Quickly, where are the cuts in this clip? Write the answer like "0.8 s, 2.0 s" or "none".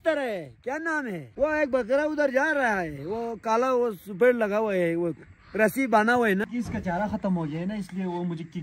1.2 s, 6.5 s